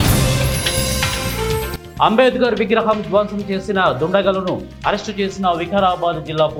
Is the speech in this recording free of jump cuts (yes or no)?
yes